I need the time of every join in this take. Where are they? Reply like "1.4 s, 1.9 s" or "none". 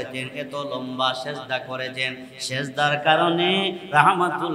none